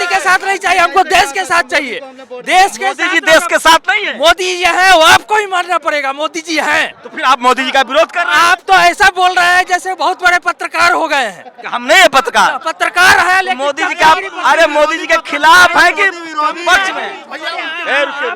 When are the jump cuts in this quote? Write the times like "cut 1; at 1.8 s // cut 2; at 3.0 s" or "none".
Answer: cut 1; at 17.1 s